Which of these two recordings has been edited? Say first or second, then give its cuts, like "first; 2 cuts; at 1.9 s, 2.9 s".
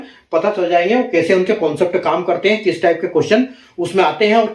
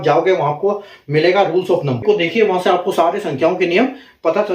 second; 1 cut; at 2.0 s